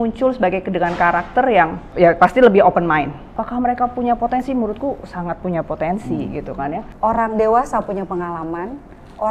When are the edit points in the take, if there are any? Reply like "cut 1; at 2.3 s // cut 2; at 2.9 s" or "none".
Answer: cut 1; at 1.8 s // cut 2; at 3.3 s // cut 3; at 6.9 s